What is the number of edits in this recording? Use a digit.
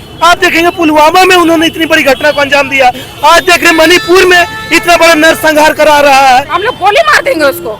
1